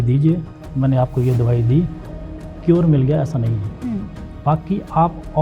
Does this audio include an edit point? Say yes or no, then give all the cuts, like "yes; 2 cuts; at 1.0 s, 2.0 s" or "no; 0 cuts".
yes; 2 cuts; at 2.1 s, 4.2 s